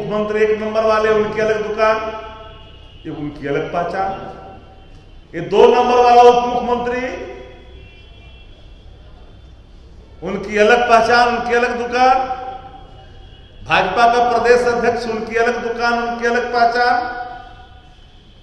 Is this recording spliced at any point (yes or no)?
no